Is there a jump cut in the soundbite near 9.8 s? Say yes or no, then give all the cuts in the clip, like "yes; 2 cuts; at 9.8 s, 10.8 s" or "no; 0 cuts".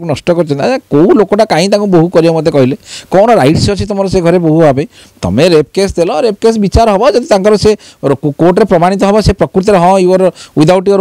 no; 0 cuts